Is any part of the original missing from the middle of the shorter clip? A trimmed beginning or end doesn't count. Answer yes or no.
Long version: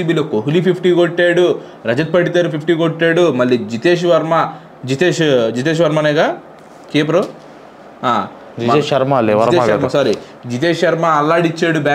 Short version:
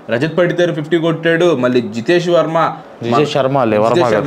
yes